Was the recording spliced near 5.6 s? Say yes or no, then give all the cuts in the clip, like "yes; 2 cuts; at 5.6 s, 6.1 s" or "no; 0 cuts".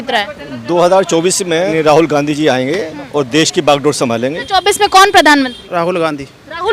yes; 3 cuts; at 1.7 s, 4.4 s, 5.6 s